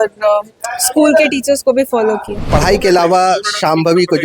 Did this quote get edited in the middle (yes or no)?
yes